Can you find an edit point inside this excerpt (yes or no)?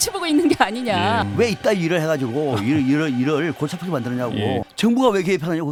no